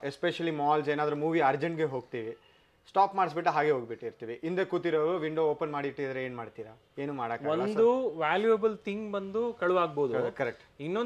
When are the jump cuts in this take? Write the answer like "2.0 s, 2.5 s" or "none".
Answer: none